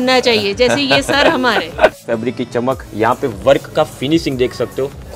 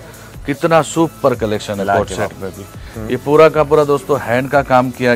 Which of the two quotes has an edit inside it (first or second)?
first